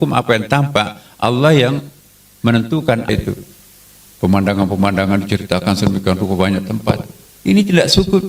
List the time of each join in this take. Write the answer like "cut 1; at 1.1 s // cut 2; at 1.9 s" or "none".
cut 1; at 3.1 s